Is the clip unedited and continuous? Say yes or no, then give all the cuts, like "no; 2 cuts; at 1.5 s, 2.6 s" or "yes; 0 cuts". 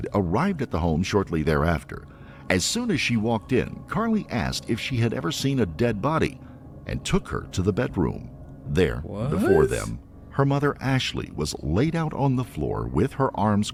yes; 0 cuts